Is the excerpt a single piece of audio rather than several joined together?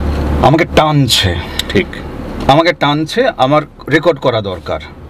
yes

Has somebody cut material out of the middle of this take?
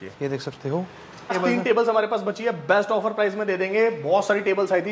yes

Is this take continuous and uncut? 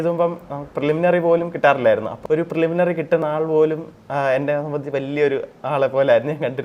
no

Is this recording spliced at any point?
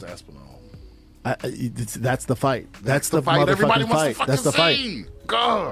no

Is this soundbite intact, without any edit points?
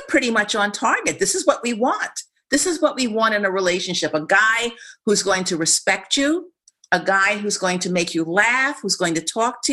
yes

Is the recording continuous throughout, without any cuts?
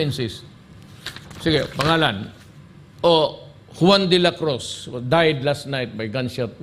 yes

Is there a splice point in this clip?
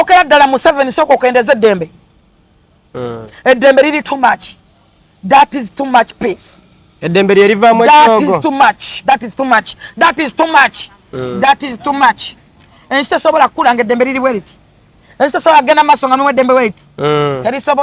no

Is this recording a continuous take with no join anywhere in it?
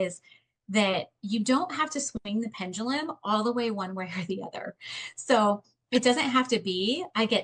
yes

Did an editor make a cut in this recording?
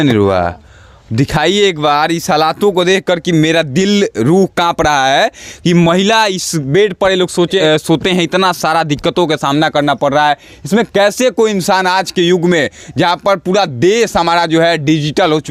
no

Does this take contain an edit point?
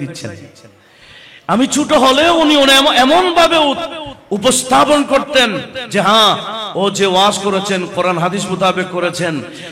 no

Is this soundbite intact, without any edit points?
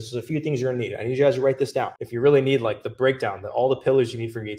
no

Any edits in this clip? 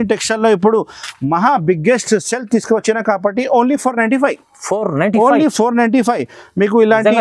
no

